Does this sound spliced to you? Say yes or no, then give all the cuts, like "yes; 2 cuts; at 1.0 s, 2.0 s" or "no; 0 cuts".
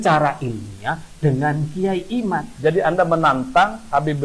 yes; 1 cut; at 2.5 s